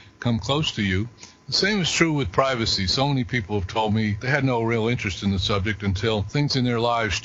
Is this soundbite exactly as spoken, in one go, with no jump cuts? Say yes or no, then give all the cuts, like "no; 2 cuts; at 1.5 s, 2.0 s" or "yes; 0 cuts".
no; 2 cuts; at 4.2 s, 6.3 s